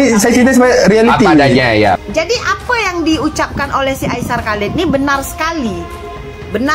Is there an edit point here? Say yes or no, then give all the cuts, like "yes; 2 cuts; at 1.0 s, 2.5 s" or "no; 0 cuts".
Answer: yes; 1 cut; at 2.0 s